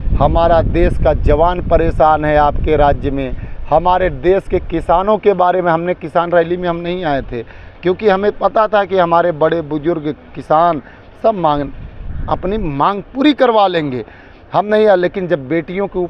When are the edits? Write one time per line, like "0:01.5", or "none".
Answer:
none